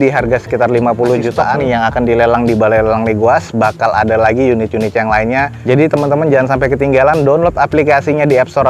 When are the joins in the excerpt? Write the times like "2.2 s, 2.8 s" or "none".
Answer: 1.5 s